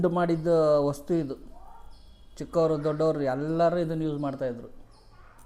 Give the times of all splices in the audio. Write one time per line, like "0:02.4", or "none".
none